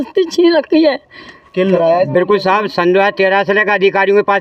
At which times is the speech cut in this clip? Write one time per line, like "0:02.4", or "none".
0:01.7